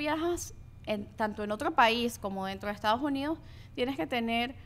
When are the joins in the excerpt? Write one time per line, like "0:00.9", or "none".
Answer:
none